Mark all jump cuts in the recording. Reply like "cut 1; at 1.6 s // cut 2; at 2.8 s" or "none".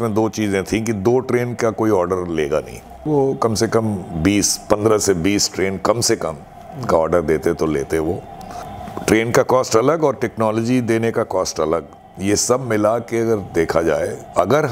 cut 1; at 3.1 s // cut 2; at 8.6 s